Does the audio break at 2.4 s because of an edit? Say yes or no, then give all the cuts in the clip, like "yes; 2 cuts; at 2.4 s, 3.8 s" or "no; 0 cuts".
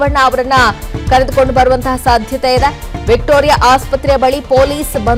no; 0 cuts